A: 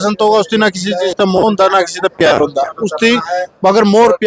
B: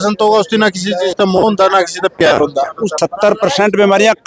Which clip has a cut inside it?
B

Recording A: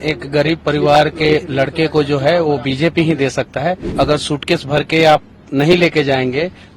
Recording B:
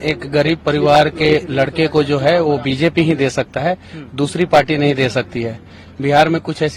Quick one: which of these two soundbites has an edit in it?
A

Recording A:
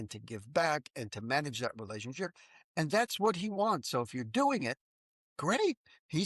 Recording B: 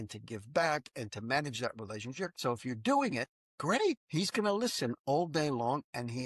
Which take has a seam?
B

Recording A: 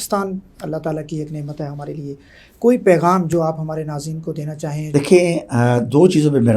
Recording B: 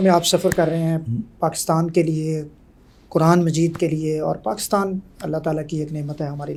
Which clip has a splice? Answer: A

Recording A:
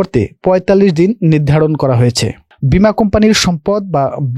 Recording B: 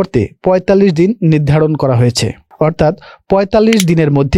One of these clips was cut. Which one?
A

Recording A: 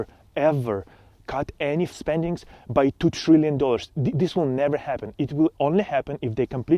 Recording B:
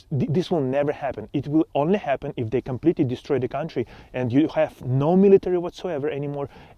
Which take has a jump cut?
A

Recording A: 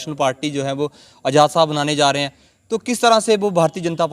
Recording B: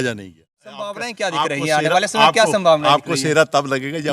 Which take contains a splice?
B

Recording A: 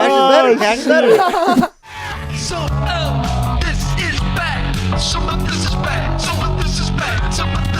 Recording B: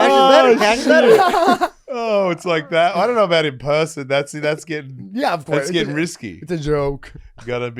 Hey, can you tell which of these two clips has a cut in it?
A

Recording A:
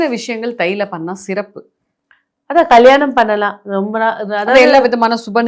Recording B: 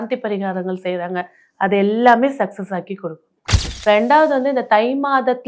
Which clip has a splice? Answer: B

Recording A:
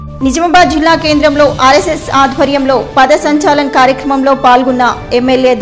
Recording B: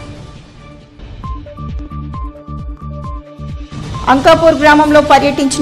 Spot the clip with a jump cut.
B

